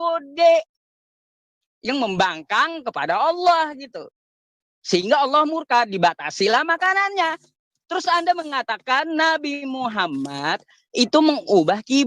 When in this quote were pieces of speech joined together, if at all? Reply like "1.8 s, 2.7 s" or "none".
none